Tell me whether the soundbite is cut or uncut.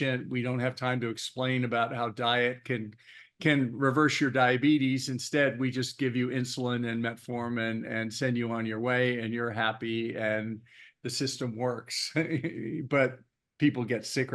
uncut